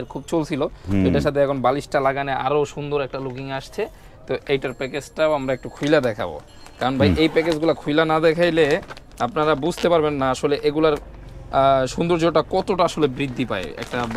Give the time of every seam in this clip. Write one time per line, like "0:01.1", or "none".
none